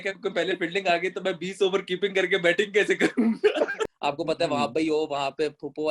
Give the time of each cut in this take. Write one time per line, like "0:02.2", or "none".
0:03.8